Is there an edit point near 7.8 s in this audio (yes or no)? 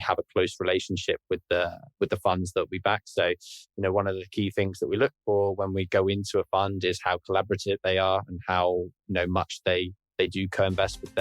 yes